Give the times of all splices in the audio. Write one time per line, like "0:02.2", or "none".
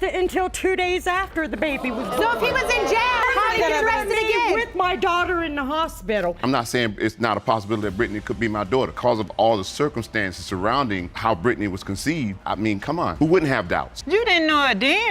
0:03.2
0:04.7
0:06.4
0:09.0